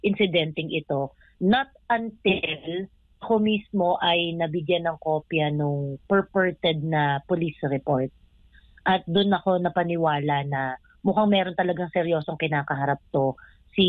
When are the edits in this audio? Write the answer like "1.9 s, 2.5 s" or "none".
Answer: none